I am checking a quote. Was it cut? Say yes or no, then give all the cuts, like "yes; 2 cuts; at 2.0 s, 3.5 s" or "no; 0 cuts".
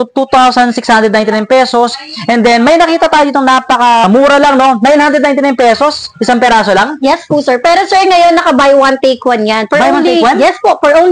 yes; 1 cut; at 4.0 s